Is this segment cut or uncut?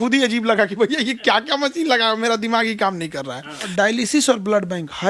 cut